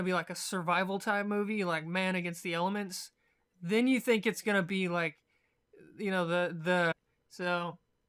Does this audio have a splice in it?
no; 0 cuts

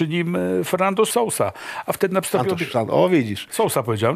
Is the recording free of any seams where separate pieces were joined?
no; 1 cut; at 1.1 s

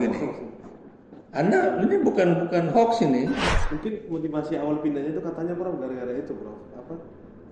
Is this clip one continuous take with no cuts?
no; 1 cut; at 3.5 s

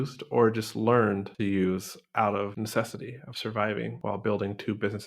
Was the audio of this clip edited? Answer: yes; 3 cuts; at 1.3 s, 2.5 s, 4.0 s

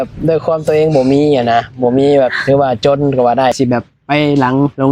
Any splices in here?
yes; 1 cut; at 3.5 s

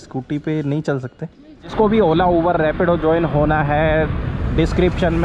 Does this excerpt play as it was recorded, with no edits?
no; 1 cut; at 1.7 s

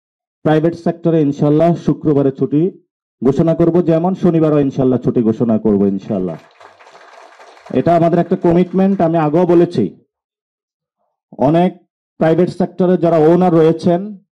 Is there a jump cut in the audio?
no; 0 cuts

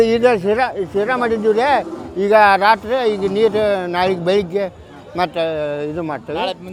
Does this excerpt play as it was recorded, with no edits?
yes; 0 cuts

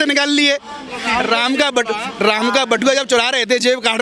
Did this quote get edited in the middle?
no; 0 cuts

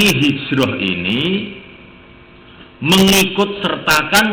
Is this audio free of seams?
yes; 0 cuts

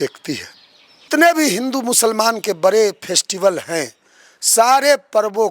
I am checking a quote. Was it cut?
yes; 1 cut; at 1.1 s

